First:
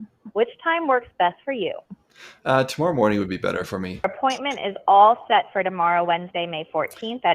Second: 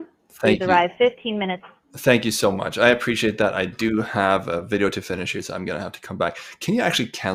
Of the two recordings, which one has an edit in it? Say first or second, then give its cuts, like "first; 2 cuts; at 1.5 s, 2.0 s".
first; 1 cut; at 4.0 s